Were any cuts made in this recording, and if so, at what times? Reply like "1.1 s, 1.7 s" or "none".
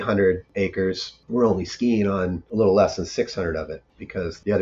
none